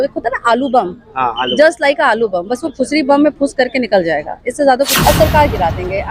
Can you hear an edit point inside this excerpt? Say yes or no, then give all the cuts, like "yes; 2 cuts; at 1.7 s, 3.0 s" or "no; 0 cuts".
yes; 1 cut; at 4.9 s